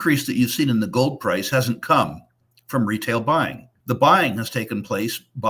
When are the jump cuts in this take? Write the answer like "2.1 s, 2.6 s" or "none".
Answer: 3.7 s